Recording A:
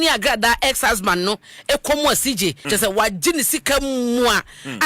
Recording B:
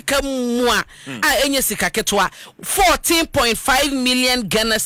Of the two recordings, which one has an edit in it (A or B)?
A